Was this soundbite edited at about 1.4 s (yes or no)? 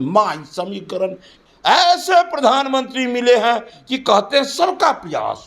yes